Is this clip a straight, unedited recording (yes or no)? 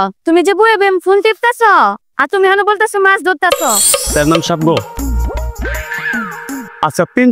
no